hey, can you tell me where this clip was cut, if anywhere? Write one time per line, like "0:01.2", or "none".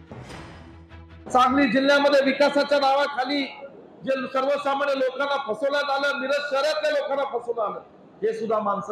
0:01.2